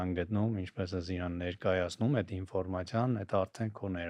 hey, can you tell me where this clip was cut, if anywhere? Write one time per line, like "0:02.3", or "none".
none